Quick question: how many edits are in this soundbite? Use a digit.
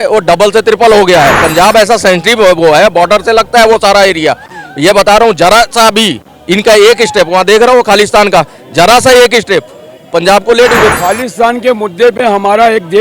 1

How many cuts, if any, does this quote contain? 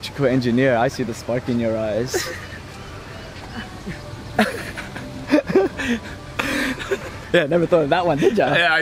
0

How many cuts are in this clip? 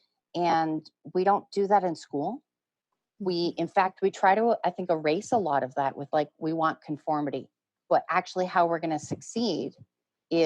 1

